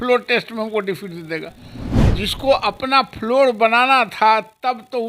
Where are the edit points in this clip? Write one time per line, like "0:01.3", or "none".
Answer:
none